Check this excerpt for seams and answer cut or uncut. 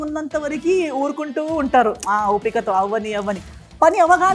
uncut